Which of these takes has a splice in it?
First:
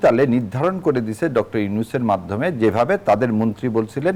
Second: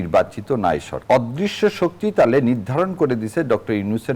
second; 1 cut; at 0.9 s

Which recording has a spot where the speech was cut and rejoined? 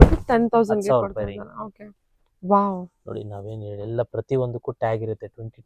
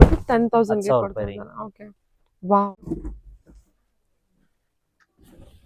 second; 1 cut; at 2.8 s

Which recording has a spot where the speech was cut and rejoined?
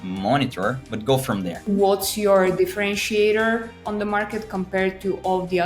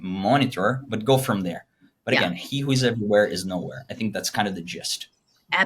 first; 1 cut; at 1.6 s

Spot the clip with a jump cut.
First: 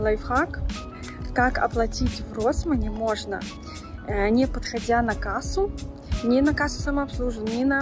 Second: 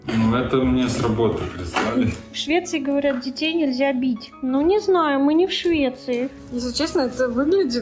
second; 3 cuts; at 2.3 s, 4.3 s, 6.4 s

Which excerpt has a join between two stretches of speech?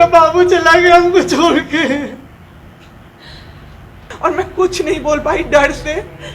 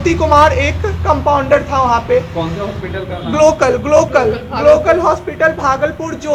first; 1 cut; at 4.1 s

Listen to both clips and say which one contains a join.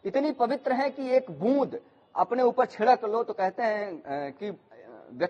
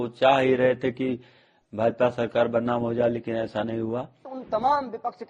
second; 1 cut; at 4.3 s

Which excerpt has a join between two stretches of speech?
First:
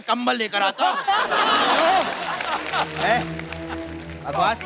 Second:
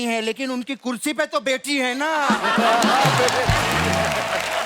first; 1 cut; at 2.9 s

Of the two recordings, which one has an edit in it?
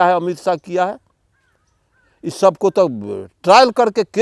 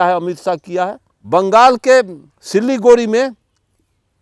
second; 1 cut; at 1.1 s

